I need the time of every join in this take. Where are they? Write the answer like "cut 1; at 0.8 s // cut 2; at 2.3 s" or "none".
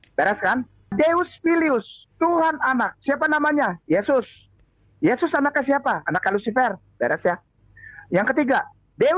none